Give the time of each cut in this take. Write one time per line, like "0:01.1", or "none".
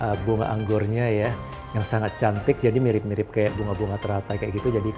none